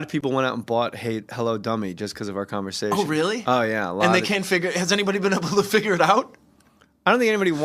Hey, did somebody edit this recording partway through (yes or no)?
yes